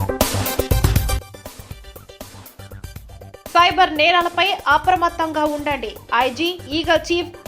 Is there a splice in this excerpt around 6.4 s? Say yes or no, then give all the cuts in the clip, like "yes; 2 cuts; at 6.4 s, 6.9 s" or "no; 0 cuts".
no; 2 cuts; at 1.2 s, 2.3 s